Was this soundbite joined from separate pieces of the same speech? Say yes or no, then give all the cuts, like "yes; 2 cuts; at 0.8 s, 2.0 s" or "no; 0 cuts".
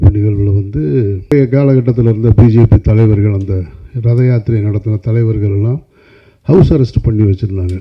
yes; 1 cut; at 1.3 s